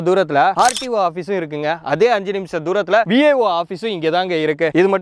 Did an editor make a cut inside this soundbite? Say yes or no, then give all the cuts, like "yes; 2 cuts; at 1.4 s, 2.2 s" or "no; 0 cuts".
no; 0 cuts